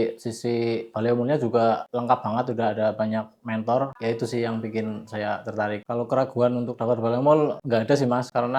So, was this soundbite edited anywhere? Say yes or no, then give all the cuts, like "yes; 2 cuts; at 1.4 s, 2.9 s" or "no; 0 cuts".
no; 0 cuts